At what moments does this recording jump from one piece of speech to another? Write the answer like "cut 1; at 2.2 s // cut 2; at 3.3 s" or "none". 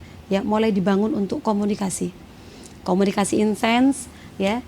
none